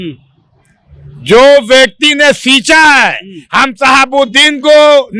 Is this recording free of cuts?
yes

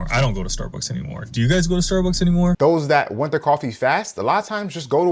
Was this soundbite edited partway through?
yes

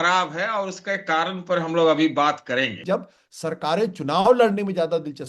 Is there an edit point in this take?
yes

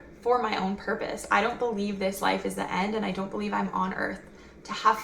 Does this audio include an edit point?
no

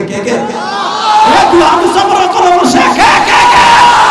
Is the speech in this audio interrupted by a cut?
no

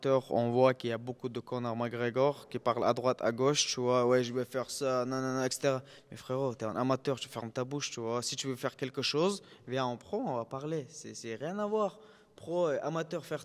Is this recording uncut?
yes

